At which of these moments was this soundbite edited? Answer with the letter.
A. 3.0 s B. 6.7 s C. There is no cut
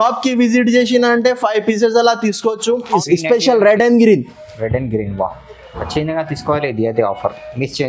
A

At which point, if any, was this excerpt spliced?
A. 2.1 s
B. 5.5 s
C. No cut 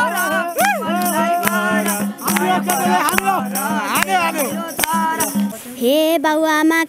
B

